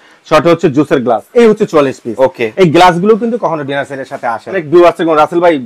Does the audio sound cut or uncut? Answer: cut